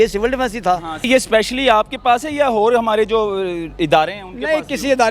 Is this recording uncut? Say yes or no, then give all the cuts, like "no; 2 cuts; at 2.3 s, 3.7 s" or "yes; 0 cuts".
no; 1 cut; at 1.1 s